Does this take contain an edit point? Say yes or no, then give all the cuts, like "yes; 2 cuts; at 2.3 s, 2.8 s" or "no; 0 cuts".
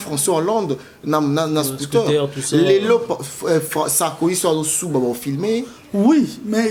no; 0 cuts